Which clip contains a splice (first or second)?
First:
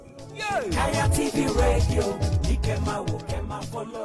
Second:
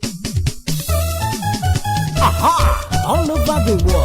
second